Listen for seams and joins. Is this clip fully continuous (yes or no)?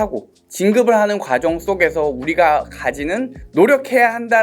no